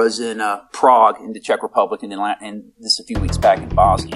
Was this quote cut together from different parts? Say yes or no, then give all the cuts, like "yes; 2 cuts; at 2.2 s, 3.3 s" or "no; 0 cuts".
no; 0 cuts